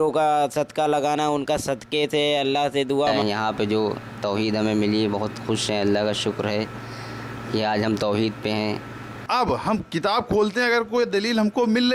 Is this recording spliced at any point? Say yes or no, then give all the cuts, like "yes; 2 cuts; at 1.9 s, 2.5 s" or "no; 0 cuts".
yes; 2 cuts; at 3.1 s, 9.2 s